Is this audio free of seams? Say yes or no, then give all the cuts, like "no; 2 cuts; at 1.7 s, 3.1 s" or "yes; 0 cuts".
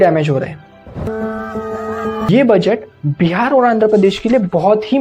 no; 2 cuts; at 1.1 s, 2.3 s